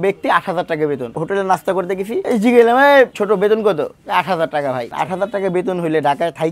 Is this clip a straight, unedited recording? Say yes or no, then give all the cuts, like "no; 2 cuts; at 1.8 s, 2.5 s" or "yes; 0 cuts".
no; 4 cuts; at 1.1 s, 2.2 s, 3.2 s, 4.9 s